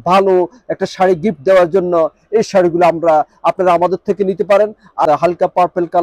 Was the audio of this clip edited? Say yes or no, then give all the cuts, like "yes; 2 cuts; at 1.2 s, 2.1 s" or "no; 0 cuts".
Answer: yes; 1 cut; at 5.1 s